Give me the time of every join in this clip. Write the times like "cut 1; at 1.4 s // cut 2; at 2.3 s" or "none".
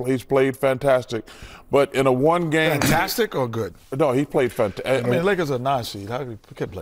none